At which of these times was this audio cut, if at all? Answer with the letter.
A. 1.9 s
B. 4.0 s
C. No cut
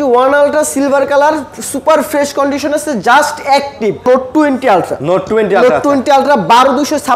B